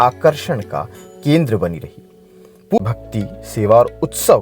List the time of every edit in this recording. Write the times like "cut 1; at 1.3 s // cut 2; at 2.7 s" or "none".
cut 1; at 2.8 s